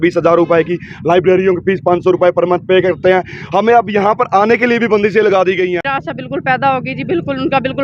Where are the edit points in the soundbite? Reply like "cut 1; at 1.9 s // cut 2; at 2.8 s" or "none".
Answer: cut 1; at 6.0 s